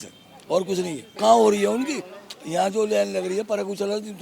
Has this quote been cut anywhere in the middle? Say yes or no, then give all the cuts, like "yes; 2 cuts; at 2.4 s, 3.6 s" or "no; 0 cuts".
yes; 1 cut; at 1.0 s